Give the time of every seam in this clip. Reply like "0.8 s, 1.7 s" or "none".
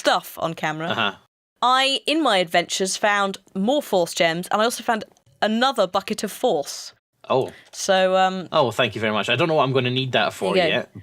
9.4 s